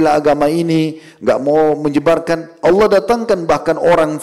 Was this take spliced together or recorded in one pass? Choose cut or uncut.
uncut